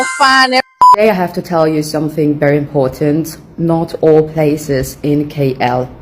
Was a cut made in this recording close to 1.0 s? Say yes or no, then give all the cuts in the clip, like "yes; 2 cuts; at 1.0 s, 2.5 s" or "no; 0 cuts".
yes; 1 cut; at 1.0 s